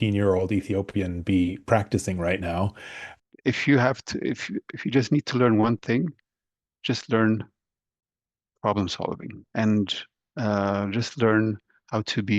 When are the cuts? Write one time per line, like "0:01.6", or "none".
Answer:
0:03.1